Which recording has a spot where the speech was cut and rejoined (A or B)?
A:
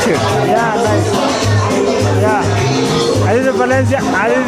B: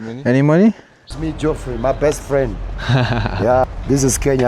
B